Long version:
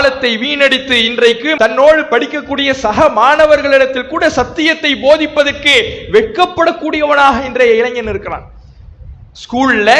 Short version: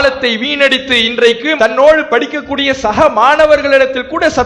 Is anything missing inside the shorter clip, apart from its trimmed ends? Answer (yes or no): no